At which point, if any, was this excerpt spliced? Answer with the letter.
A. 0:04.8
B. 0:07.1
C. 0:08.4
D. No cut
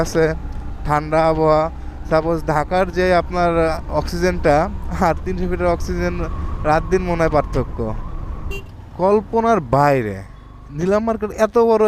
C